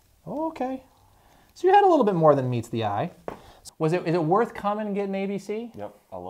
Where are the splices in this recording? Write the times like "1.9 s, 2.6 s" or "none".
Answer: 3.6 s